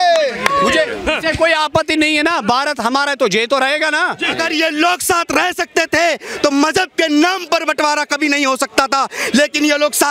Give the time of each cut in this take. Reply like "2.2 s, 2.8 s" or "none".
4.4 s